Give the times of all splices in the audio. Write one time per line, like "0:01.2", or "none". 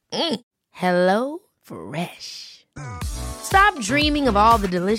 none